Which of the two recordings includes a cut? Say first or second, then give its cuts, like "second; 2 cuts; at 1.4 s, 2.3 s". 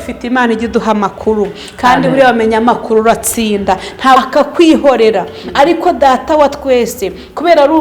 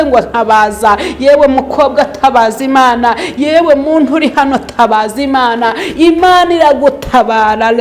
first; 1 cut; at 4.2 s